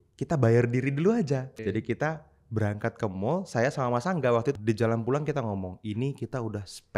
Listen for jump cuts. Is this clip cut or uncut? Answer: cut